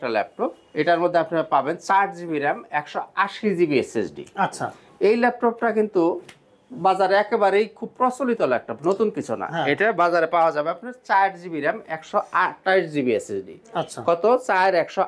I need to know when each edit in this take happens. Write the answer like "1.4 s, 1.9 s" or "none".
none

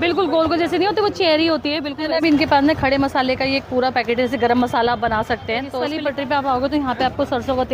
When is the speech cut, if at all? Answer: 1.9 s, 5.8 s

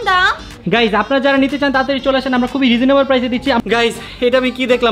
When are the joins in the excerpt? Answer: 3.6 s

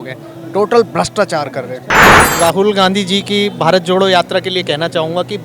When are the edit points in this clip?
2.2 s

